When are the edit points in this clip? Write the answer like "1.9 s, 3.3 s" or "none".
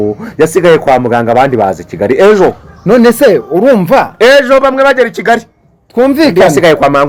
none